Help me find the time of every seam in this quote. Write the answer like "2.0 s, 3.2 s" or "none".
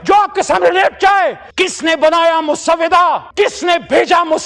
1.5 s